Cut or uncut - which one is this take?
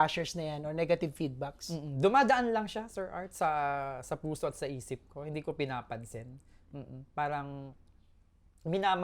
uncut